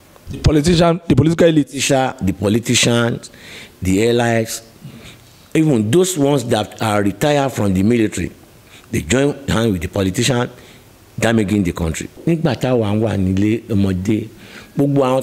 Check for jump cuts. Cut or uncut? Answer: cut